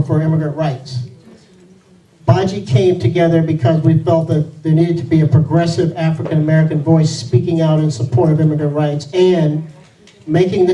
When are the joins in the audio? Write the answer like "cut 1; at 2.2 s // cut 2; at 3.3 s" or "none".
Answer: cut 1; at 6.4 s